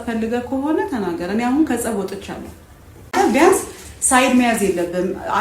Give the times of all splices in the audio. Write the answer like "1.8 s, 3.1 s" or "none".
3.1 s

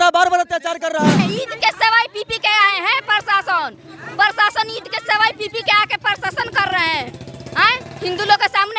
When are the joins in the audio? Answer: 1.2 s

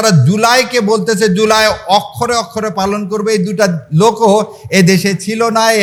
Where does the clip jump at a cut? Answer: none

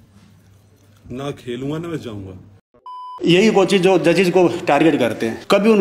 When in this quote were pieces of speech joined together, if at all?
3.0 s

